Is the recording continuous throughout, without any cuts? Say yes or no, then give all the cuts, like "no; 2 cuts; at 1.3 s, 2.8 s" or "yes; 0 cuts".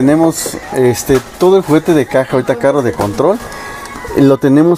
yes; 0 cuts